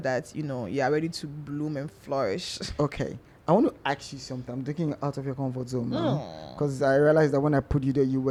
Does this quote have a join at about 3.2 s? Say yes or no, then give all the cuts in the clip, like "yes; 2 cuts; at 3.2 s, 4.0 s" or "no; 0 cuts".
no; 0 cuts